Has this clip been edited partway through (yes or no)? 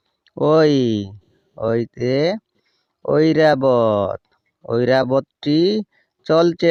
no